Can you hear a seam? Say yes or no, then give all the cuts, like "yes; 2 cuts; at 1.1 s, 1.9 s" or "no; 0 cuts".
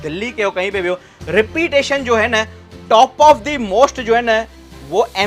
no; 0 cuts